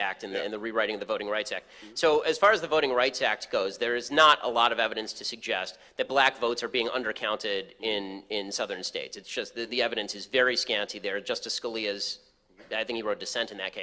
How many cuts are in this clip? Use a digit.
1